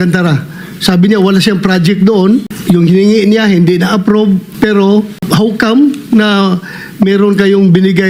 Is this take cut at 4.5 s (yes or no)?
no